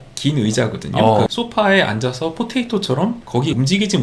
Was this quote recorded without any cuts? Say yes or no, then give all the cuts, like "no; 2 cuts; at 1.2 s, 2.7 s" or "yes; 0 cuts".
no; 2 cuts; at 1.3 s, 3.3 s